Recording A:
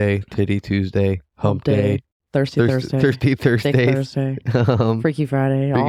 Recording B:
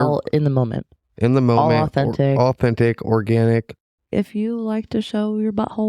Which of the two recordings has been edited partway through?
B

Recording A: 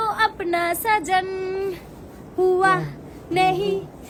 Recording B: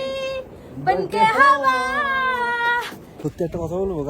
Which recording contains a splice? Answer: B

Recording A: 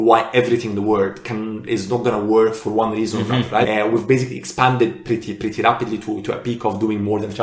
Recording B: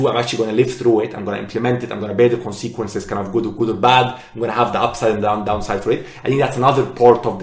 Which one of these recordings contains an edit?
A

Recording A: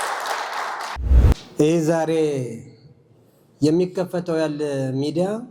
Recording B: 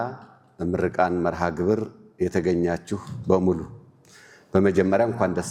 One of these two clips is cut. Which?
A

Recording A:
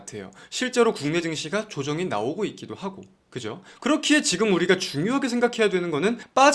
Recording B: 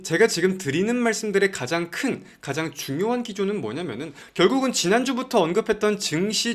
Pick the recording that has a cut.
A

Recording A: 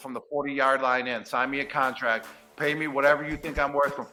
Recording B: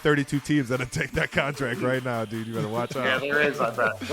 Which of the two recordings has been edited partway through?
B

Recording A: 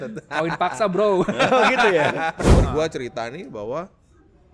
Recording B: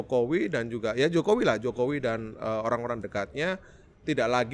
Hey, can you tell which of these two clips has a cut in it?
A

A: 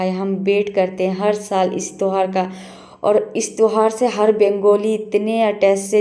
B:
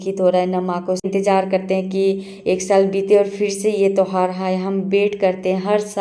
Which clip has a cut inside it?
B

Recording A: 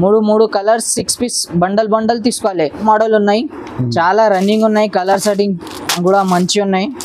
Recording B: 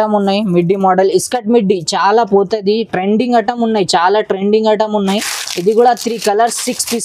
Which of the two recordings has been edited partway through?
A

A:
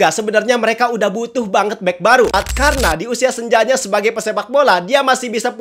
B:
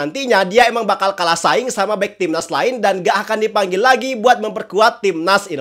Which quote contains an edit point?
A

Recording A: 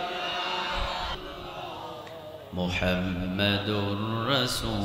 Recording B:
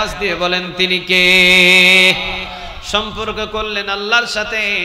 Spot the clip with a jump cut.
A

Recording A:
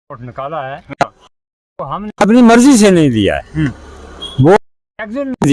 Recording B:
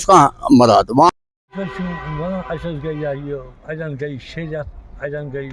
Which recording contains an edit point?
B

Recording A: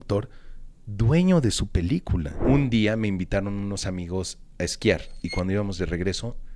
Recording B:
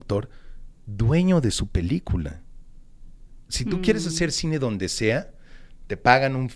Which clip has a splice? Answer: A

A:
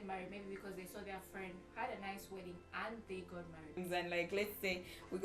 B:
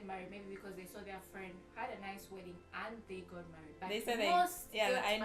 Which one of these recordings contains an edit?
A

